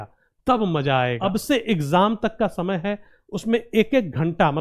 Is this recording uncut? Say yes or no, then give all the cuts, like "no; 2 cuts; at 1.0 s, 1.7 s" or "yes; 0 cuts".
no; 1 cut; at 1.3 s